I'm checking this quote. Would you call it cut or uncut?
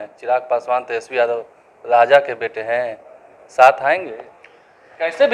uncut